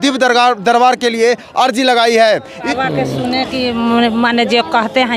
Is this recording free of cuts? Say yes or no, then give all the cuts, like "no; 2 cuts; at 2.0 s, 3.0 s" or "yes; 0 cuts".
no; 1 cut; at 2.6 s